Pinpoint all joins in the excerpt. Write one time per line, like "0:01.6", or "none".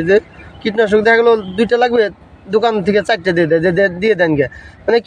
none